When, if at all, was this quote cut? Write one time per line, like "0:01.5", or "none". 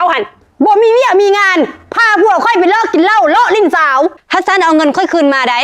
0:04.2